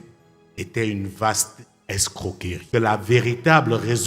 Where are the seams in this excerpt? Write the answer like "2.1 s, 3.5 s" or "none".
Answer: 2.5 s